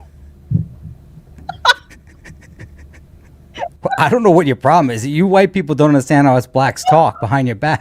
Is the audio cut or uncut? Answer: uncut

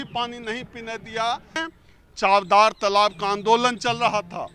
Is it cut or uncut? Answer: cut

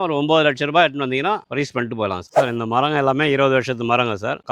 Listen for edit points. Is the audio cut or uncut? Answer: cut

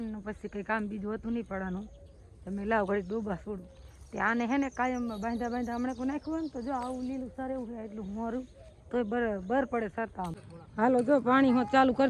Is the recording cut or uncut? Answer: cut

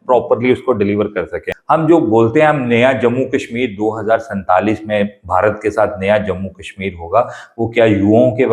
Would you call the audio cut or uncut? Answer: cut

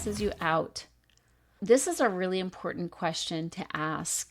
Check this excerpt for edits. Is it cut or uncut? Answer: cut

